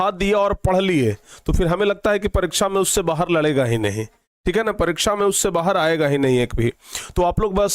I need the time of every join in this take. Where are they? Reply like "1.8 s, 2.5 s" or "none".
6.5 s